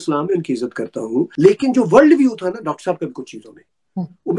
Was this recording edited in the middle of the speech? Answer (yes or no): yes